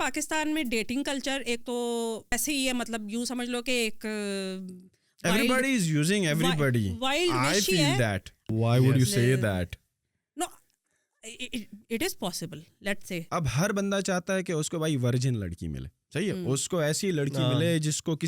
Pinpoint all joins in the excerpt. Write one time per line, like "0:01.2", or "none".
0:02.3
0:08.5
0:13.2